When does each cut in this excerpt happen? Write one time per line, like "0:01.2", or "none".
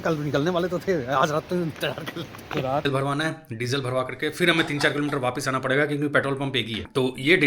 0:02.9